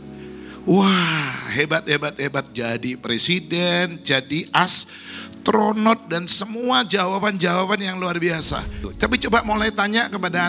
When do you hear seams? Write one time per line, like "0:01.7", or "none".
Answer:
0:08.9